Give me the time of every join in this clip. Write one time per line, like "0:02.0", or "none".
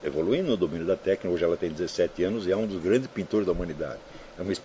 none